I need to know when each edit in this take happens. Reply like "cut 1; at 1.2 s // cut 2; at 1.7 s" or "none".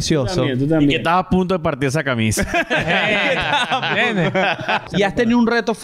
cut 1; at 4.9 s